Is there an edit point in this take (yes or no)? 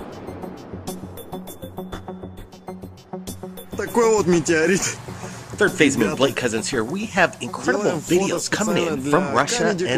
no